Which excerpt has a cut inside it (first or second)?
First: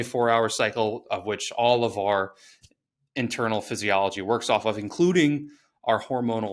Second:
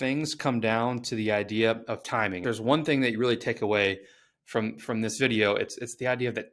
second